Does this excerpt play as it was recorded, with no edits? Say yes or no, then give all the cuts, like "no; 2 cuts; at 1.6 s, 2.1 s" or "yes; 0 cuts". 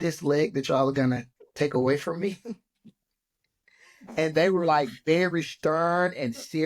yes; 0 cuts